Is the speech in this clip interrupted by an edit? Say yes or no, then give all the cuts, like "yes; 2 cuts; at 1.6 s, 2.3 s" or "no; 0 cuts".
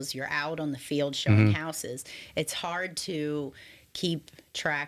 no; 0 cuts